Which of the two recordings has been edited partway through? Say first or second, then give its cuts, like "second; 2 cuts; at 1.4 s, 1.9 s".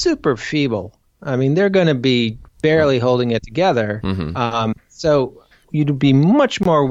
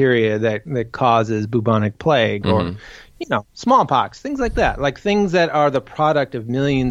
first; 2 cuts; at 2.4 s, 5.6 s